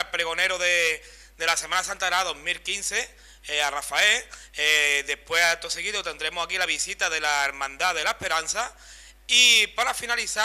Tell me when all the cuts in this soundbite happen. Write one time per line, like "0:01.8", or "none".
none